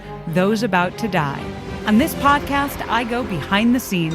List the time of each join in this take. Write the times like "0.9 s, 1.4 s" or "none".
1.7 s